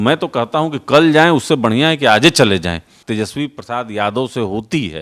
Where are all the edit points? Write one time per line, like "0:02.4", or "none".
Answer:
0:02.9

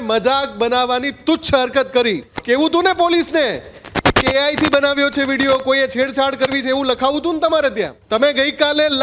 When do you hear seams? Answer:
0:02.3
0:08.0

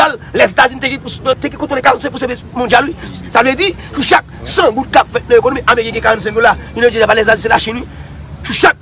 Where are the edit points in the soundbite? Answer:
0:01.4

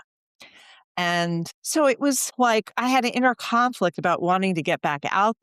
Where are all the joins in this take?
0:01.6
0:02.3

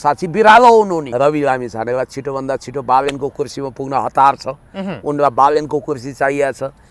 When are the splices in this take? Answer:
0:01.0

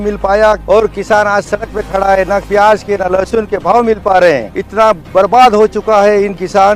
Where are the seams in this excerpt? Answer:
none

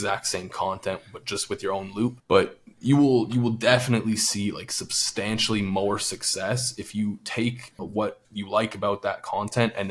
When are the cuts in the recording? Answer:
0:07.8

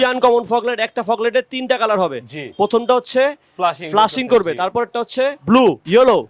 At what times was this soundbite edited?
none

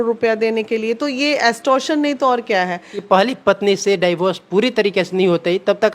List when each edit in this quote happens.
0:02.9

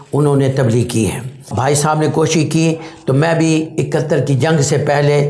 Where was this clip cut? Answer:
0:01.5

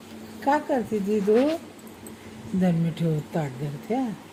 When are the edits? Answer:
none

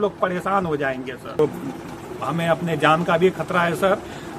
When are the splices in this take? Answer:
0:01.4

